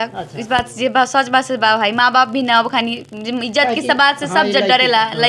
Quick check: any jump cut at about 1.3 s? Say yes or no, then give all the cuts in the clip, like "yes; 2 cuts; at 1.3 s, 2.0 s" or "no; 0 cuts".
no; 0 cuts